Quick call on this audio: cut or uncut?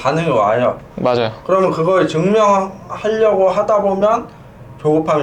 uncut